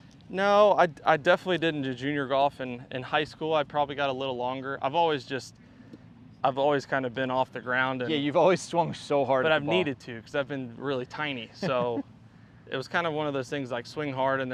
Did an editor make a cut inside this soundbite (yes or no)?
no